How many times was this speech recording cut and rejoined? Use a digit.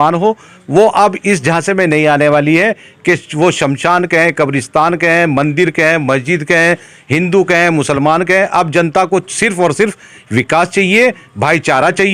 0